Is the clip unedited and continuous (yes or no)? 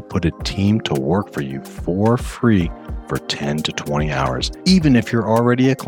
no